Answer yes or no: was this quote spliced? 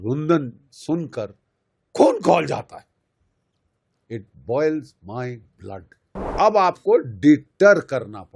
yes